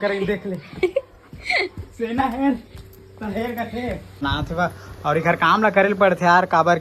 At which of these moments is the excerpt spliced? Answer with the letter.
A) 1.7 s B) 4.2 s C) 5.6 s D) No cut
B